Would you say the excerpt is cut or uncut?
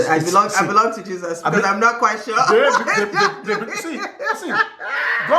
uncut